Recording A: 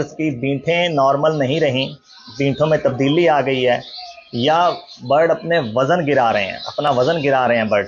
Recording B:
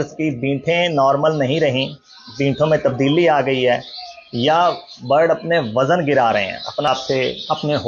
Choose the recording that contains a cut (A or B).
B